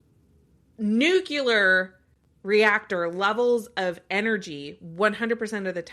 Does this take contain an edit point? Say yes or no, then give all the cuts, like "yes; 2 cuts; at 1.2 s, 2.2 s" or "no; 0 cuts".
no; 0 cuts